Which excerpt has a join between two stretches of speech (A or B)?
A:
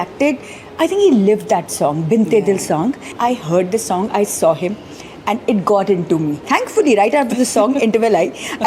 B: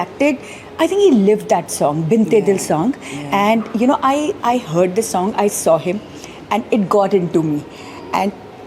A